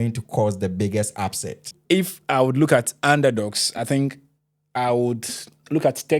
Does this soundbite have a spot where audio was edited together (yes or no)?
yes